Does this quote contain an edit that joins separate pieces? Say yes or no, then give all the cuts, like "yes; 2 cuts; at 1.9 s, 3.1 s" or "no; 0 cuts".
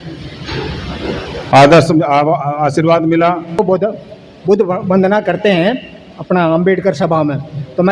yes; 1 cut; at 3.6 s